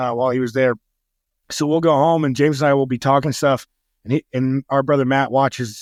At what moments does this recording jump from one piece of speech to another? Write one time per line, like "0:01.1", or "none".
none